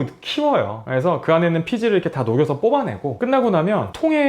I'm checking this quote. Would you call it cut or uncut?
uncut